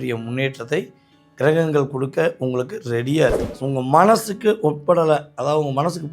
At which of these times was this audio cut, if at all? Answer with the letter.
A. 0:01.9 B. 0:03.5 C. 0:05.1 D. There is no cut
B